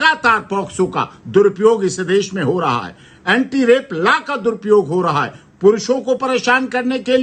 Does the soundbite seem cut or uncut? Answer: uncut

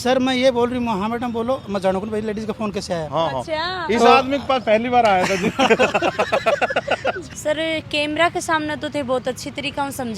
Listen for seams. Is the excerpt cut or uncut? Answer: cut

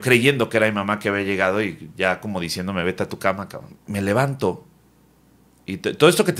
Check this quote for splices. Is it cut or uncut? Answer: cut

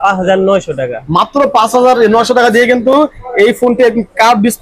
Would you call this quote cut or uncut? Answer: uncut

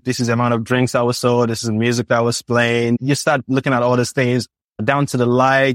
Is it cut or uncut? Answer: uncut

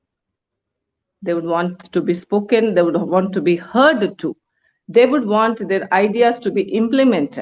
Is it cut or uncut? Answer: uncut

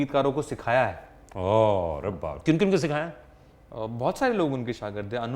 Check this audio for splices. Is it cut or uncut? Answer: uncut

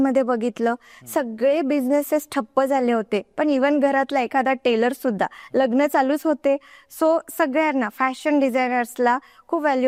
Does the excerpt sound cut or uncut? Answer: uncut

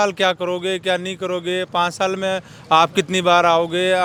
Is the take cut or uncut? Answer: uncut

